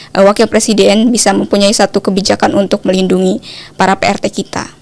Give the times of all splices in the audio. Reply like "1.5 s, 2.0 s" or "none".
none